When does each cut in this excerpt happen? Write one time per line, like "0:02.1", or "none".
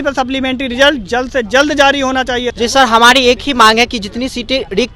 0:02.5